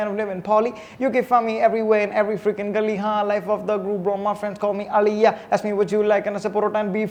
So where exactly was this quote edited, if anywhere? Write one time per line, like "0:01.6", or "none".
none